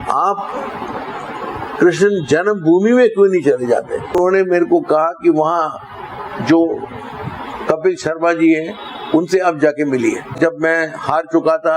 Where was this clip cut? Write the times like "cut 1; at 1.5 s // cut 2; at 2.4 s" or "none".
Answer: cut 1; at 4.2 s // cut 2; at 10.3 s